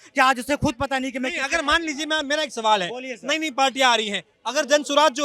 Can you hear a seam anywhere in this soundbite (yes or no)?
no